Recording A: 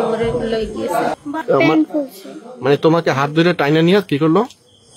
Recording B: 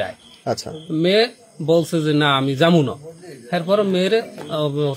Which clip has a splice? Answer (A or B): A